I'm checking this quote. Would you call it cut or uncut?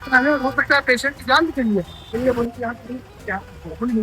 cut